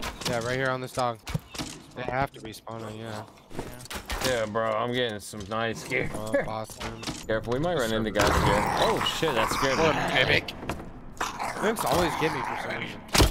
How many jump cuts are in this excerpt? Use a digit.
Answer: 2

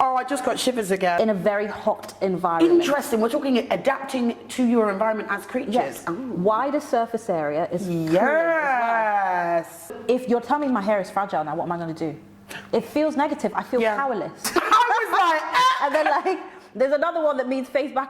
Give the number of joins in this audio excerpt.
3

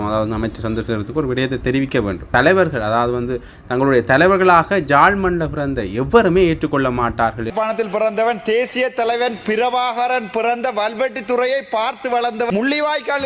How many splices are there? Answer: 3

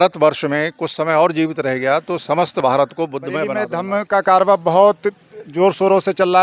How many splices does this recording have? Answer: 1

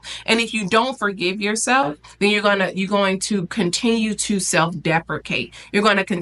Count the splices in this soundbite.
0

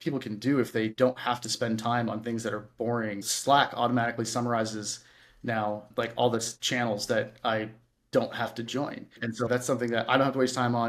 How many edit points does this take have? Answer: 2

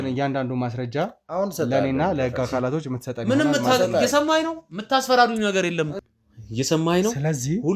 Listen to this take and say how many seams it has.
1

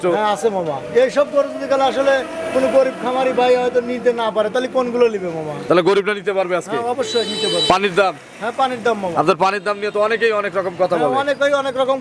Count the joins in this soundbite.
0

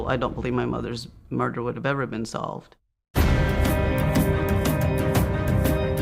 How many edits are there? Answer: 1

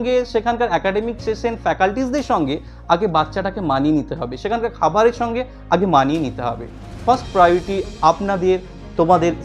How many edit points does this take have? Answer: 0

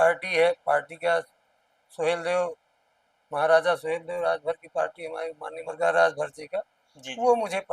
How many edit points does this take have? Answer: 1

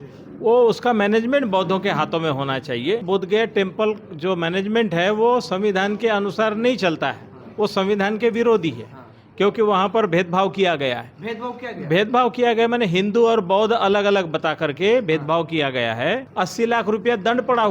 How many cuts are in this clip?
2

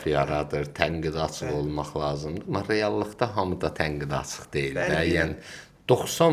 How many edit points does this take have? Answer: 0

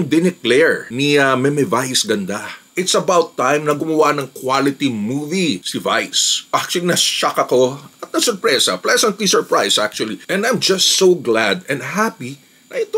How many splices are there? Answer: 3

